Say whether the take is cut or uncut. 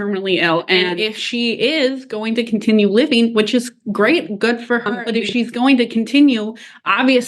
cut